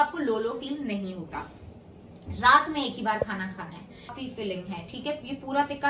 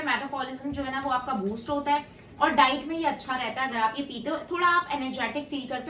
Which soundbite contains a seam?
first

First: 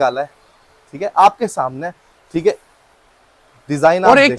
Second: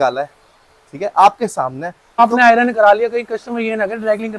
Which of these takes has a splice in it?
second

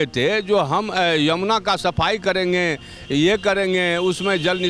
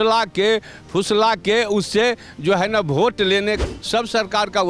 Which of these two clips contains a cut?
second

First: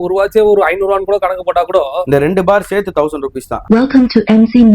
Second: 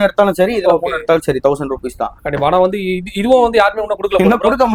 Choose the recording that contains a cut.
first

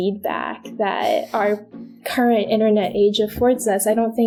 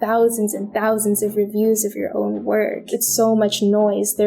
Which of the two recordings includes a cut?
second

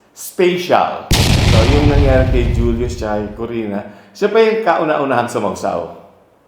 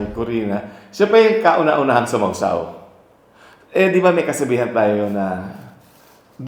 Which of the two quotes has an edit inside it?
first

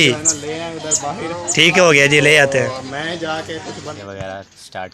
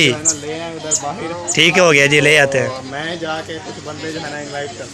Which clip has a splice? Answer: first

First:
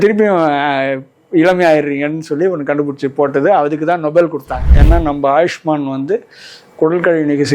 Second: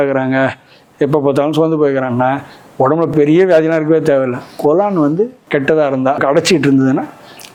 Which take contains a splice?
first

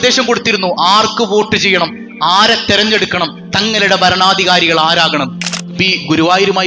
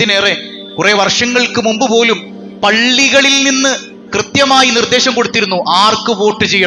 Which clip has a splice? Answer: first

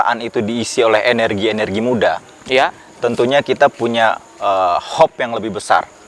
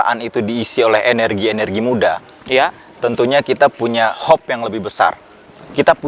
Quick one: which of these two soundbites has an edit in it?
second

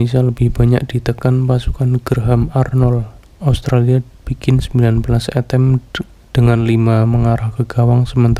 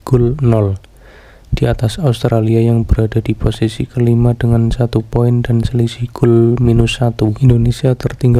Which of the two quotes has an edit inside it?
second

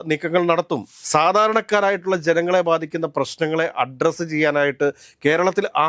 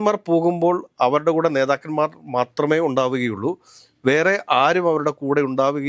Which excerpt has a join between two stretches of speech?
first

